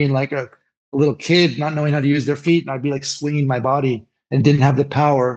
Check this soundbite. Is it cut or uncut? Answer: cut